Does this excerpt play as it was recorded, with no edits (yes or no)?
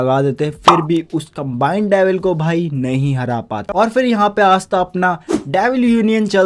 no